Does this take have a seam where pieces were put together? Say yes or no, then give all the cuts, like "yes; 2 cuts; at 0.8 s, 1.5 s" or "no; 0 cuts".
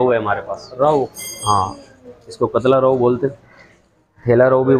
no; 0 cuts